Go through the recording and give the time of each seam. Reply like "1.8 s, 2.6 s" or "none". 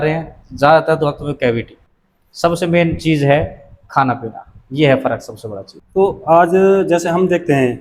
none